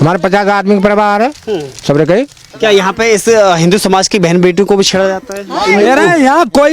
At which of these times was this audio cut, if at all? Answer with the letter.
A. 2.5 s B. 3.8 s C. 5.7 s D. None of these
A